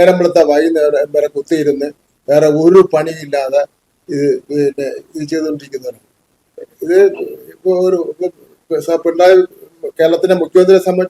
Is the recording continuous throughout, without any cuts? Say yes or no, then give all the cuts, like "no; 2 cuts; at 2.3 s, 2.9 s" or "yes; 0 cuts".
yes; 0 cuts